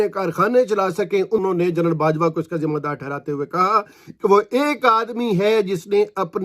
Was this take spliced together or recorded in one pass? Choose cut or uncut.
cut